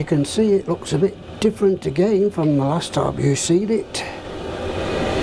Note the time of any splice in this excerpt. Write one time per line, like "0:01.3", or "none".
none